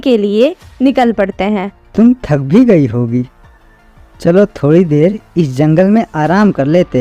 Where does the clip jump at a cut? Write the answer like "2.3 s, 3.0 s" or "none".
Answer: 1.8 s